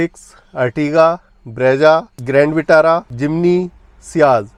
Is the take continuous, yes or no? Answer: yes